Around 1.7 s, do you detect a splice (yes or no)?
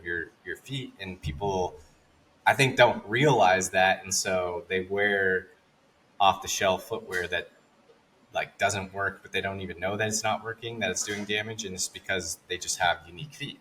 no